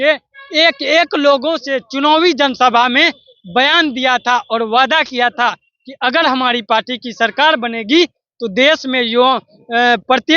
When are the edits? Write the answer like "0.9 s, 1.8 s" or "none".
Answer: none